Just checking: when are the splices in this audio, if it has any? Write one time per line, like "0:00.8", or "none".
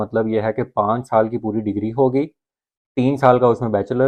none